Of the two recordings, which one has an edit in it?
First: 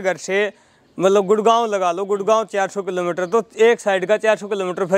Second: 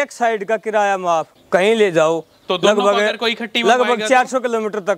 second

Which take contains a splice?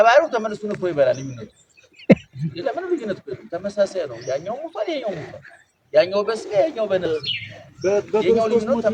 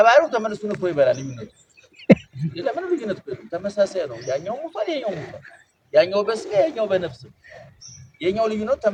first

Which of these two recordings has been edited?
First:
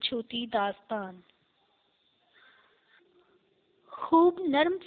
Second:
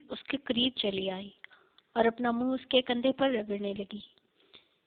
first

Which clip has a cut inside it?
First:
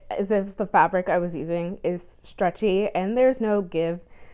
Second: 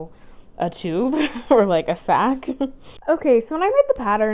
second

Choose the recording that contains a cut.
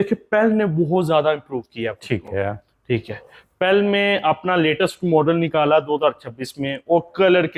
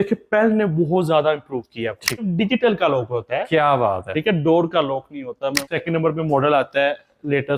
second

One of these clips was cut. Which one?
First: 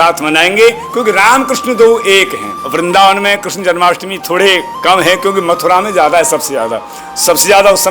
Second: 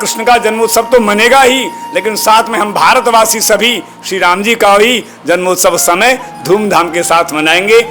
first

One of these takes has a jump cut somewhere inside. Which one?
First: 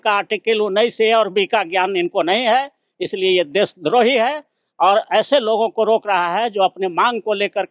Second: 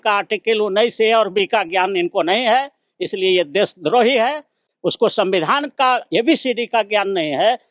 second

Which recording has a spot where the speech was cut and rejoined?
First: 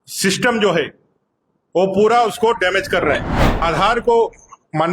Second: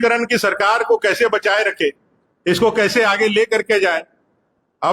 first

